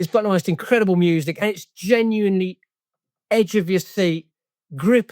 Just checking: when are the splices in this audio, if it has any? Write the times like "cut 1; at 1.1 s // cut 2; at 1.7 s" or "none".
cut 1; at 1.3 s